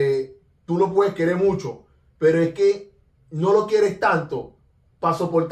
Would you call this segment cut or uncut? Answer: uncut